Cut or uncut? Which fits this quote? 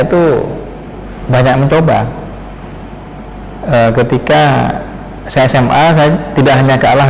uncut